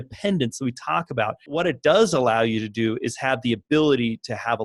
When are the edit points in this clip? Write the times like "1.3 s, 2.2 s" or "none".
1.6 s